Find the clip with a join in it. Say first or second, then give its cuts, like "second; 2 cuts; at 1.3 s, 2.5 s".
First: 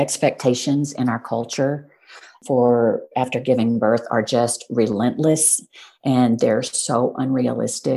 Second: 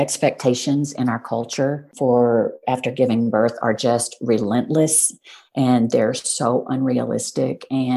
second; 1 cut; at 1.9 s